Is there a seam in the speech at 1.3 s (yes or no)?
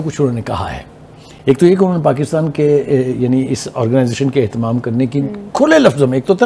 no